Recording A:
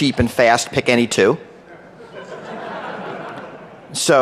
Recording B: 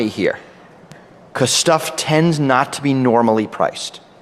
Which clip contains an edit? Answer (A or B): A